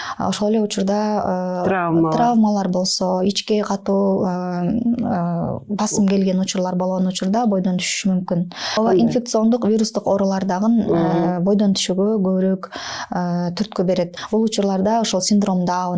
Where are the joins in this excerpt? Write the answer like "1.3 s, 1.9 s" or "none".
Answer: 8.7 s, 14.2 s